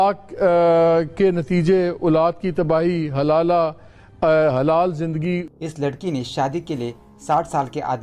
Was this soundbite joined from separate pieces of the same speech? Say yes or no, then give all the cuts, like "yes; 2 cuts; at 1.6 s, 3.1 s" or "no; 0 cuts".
yes; 1 cut; at 5.4 s